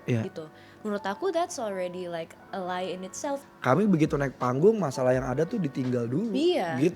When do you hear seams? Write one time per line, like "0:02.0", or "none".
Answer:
0:03.5